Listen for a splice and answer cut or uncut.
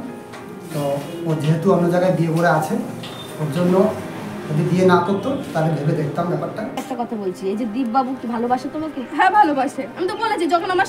cut